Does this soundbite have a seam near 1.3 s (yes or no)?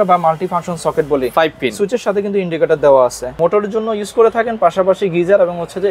no